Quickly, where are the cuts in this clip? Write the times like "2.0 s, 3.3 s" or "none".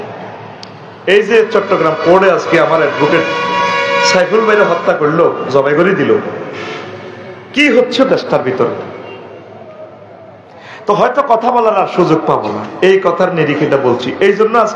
none